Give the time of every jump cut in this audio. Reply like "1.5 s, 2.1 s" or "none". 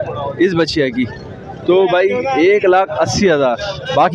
none